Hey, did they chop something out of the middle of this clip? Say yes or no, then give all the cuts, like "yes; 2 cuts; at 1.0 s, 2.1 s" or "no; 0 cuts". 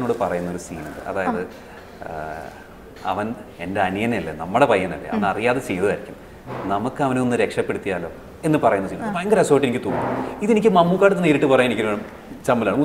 no; 0 cuts